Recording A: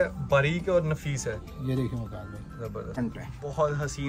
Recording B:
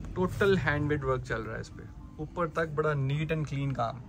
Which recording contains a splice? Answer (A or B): A